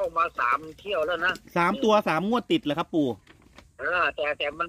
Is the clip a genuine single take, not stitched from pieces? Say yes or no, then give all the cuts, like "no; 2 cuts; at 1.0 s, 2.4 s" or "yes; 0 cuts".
yes; 0 cuts